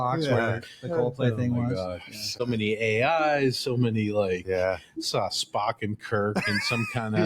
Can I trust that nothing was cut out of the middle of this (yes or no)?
no